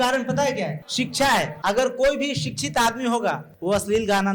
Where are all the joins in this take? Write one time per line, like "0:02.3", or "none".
0:00.8
0:01.5
0:03.5